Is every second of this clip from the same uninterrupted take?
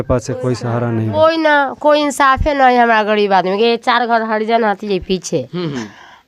no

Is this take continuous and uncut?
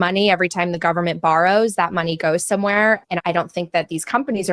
yes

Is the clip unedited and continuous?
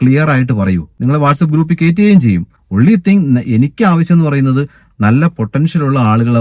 no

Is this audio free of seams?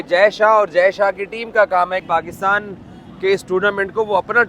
no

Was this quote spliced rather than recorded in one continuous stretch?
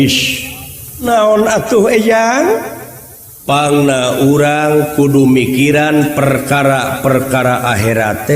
yes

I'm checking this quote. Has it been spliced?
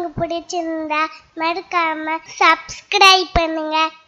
yes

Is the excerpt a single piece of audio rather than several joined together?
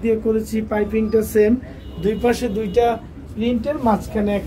yes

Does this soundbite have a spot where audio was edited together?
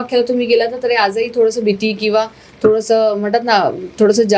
no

